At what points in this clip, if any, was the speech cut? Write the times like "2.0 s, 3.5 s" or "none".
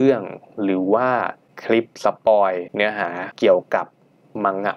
1.8 s, 3.0 s